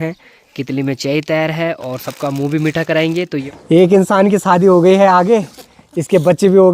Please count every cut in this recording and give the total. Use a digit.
1